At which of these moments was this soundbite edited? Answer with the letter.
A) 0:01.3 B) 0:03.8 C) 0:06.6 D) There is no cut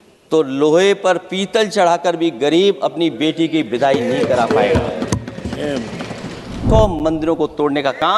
C